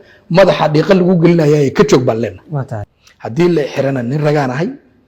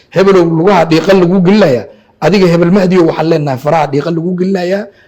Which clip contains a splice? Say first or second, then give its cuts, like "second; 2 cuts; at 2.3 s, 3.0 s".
first; 1 cut; at 3.0 s